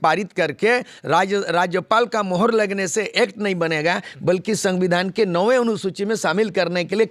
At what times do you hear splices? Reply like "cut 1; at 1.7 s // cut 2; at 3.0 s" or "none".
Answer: none